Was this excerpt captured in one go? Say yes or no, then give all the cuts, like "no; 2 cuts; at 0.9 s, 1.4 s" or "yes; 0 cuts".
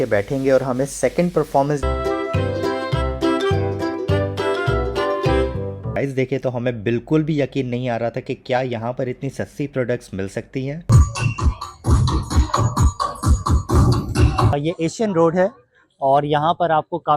no; 4 cuts; at 1.8 s, 6.0 s, 10.9 s, 14.5 s